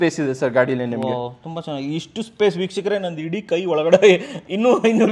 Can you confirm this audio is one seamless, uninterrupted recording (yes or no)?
yes